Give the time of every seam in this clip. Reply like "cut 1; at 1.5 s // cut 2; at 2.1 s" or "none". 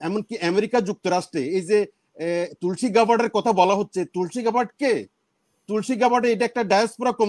none